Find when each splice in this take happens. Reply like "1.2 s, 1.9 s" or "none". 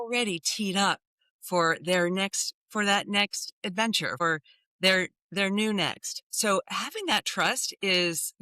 4.2 s, 6.3 s

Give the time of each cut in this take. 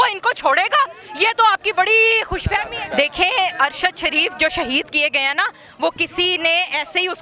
2.7 s

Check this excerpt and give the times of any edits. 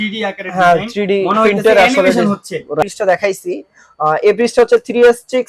2.8 s

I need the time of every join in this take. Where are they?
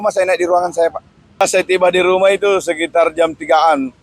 1.4 s

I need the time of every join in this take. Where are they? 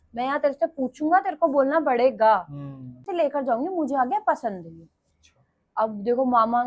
3.0 s

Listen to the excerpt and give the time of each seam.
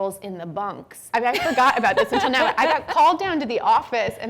1.1 s

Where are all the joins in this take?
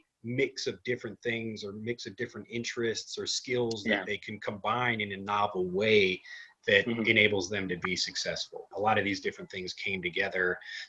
8.7 s

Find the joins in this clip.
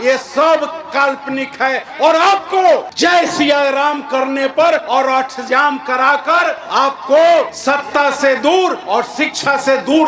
2.9 s, 4.8 s, 6.6 s, 7.6 s, 8.8 s

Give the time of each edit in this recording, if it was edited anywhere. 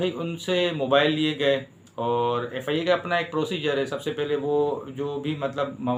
none

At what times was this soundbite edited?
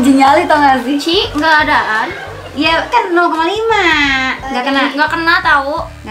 none

